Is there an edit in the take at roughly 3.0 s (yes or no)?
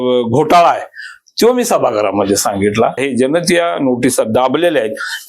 yes